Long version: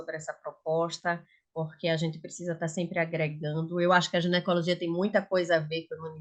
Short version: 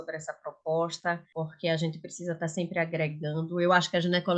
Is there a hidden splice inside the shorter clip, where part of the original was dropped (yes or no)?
yes